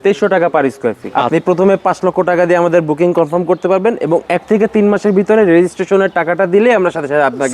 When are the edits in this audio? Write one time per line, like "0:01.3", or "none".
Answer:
0:01.1